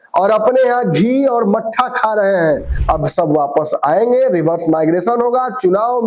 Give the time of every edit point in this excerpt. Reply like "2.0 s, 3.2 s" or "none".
2.7 s